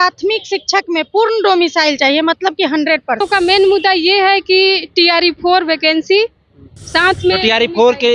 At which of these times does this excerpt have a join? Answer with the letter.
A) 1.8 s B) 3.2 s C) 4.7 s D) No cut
B